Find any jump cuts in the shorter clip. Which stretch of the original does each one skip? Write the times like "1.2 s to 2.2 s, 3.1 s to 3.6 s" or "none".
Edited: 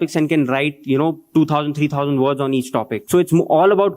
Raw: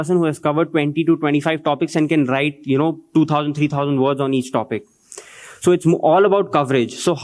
4.8 s to 5.5 s